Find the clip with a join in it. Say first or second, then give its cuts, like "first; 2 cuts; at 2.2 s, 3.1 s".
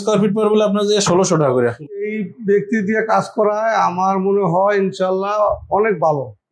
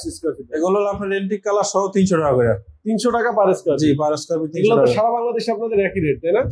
first; 1 cut; at 2.2 s